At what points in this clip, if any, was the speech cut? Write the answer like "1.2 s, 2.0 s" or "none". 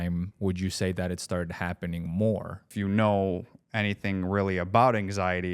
2.7 s